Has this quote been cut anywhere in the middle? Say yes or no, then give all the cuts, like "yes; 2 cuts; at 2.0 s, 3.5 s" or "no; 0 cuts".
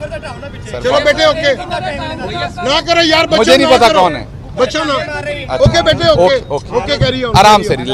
no; 0 cuts